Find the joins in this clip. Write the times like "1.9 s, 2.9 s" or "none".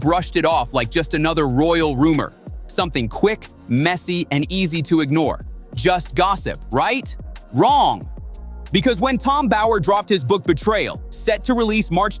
8.4 s